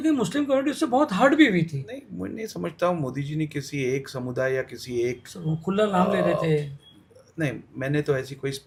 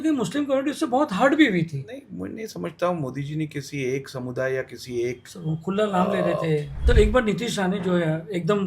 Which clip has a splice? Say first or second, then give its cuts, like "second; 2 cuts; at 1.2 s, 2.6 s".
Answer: second; 1 cut; at 6.7 s